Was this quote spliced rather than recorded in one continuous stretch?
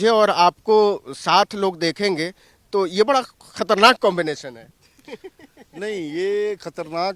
no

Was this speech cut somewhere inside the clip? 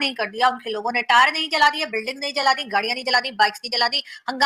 no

